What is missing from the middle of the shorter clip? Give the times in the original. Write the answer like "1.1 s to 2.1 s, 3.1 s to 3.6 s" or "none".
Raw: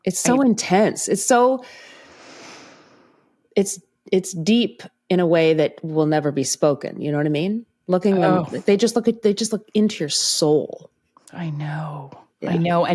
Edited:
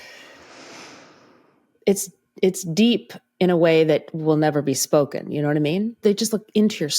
7.7 s to 9.2 s